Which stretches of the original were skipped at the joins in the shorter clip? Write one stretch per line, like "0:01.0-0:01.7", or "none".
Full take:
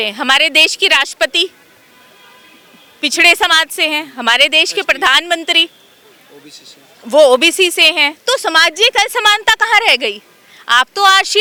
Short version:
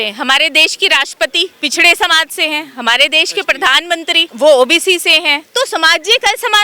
0:01.5-0:02.9
0:05.7-0:07.0